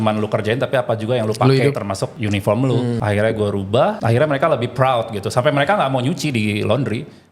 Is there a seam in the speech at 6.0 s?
no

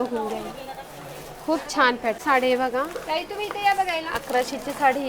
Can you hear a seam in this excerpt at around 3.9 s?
no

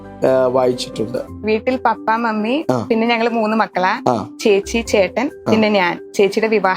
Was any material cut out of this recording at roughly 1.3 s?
yes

